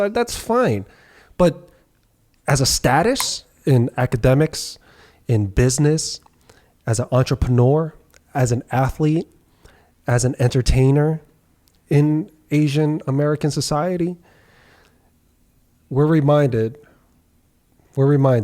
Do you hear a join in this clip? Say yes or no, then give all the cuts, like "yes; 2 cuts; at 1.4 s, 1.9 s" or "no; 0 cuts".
yes; 1 cut; at 3.5 s